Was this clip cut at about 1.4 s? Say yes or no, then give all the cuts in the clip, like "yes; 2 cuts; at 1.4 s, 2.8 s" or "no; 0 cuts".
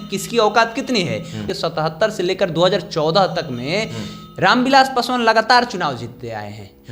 yes; 1 cut; at 1.4 s